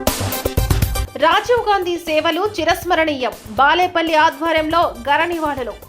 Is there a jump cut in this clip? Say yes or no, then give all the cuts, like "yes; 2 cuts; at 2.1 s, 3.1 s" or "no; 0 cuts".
yes; 1 cut; at 1.1 s